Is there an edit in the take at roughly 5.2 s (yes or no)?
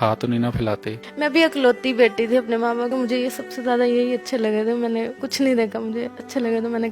yes